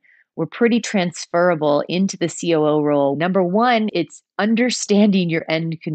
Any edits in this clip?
yes; 1 cut; at 3.1 s

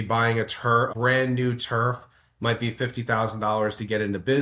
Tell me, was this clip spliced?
yes; 1 cut; at 0.9 s

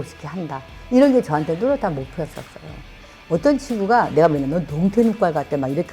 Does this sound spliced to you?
yes; 1 cut; at 3.0 s

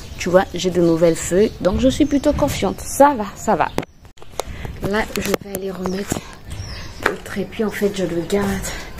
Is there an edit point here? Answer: no; 0 cuts

